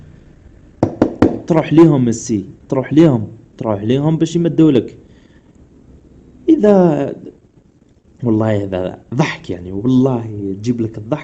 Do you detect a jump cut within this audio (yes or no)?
yes